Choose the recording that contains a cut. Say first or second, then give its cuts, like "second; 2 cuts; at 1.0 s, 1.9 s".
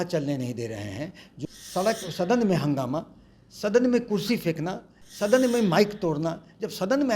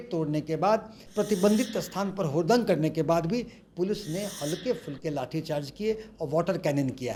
first; 1 cut; at 1.2 s